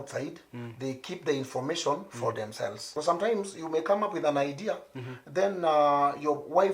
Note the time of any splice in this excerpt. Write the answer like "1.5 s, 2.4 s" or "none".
2.9 s